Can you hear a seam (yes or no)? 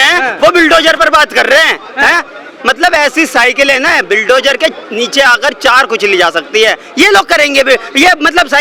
no